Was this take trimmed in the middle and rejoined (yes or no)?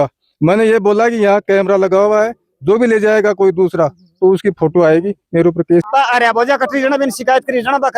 yes